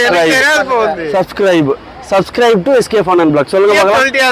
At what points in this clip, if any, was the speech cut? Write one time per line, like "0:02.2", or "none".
none